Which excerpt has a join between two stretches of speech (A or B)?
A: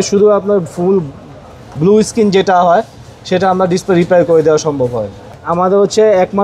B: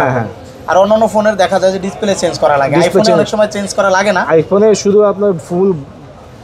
A